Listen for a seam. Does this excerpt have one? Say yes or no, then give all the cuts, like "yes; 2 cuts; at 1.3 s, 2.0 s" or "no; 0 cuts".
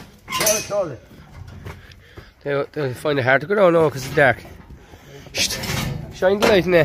no; 0 cuts